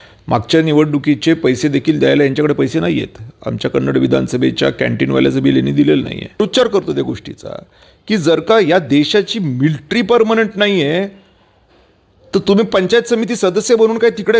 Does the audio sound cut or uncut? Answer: cut